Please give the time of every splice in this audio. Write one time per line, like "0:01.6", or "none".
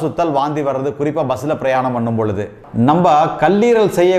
0:02.6